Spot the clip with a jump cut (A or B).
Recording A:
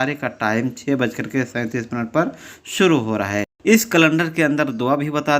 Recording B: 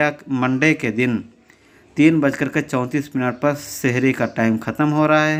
A